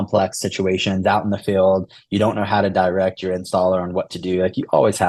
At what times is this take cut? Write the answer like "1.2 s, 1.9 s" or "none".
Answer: none